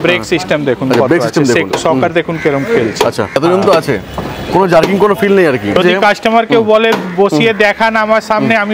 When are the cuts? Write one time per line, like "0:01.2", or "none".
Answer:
0:03.4
0:05.8